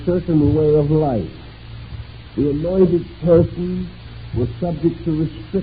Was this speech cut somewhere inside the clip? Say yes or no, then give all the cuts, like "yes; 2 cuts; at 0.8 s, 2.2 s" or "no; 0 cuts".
yes; 1 cut; at 3.4 s